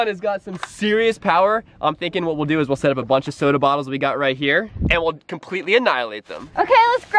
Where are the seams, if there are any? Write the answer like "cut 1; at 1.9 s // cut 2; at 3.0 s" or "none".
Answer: cut 1; at 4.8 s